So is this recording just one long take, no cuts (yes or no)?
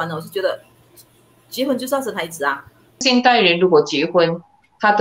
no